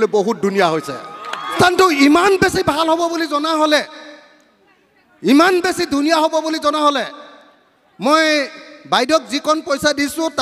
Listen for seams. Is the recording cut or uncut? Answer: cut